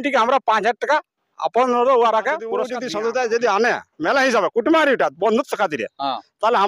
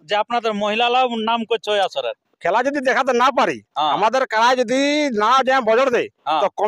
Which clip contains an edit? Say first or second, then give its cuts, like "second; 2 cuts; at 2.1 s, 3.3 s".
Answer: first; 1 cut; at 2.8 s